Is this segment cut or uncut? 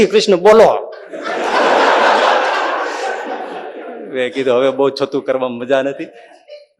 uncut